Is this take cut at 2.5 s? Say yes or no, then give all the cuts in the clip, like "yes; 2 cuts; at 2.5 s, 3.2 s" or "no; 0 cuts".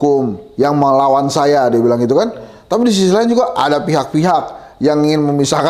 no; 0 cuts